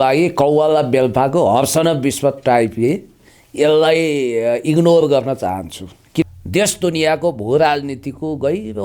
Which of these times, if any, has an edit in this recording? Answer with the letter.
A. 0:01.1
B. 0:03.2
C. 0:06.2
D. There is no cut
C